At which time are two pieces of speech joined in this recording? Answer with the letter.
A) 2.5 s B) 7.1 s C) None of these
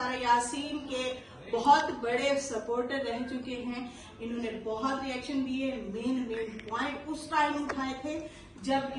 C